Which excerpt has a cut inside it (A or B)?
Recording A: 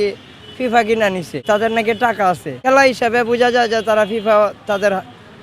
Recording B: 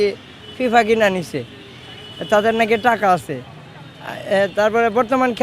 A